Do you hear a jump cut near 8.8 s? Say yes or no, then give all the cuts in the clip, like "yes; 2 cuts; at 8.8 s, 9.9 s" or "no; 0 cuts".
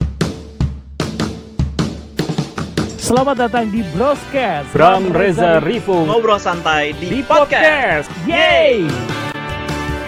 no; 0 cuts